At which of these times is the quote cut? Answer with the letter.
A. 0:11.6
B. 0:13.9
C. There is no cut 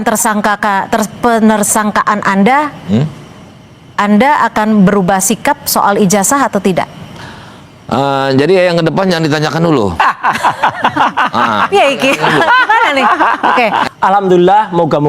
B